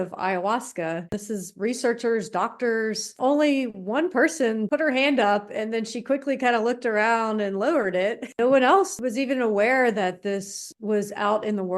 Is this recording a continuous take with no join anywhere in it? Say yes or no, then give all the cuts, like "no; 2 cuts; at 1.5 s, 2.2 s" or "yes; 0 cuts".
no; 5 cuts; at 1.2 s, 3.2 s, 4.7 s, 8.3 s, 9.0 s